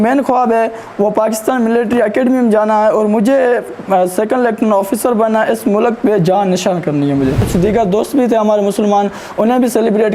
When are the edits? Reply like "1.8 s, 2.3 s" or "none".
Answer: 7.5 s